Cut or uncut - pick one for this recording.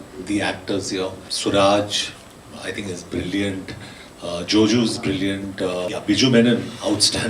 cut